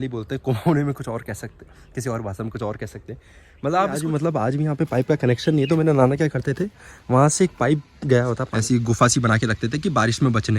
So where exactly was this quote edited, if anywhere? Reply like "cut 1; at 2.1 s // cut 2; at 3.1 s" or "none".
cut 1; at 3.9 s // cut 2; at 8.4 s